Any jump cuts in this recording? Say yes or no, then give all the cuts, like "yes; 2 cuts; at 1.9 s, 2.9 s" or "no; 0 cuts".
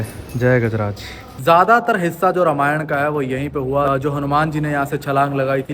yes; 2 cuts; at 1.2 s, 3.9 s